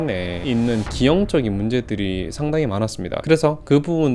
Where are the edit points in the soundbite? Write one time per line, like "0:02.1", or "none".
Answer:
none